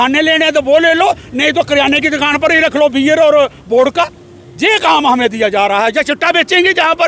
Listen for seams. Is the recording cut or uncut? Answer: uncut